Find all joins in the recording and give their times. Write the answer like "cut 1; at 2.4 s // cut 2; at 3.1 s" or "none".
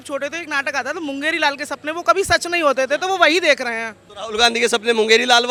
none